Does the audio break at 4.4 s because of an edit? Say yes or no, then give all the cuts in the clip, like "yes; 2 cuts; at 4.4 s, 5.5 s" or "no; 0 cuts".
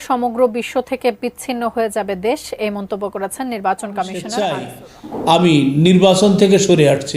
yes; 1 cut; at 4.4 s